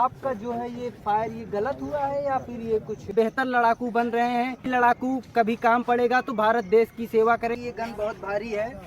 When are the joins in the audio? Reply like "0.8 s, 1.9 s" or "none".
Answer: 3.1 s, 4.7 s, 7.6 s